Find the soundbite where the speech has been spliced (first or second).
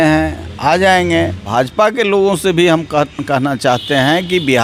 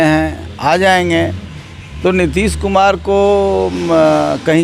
first